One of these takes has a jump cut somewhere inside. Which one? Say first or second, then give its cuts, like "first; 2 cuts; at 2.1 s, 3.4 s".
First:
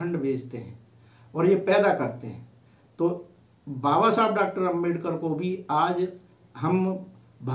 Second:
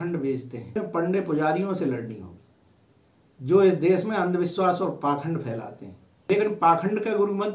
second; 2 cuts; at 0.8 s, 6.1 s